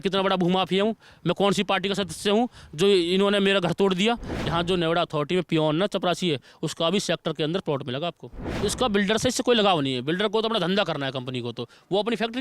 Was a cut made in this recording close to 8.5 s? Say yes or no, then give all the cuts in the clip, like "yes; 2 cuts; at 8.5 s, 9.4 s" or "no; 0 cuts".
yes; 2 cuts; at 4.3 s, 8.5 s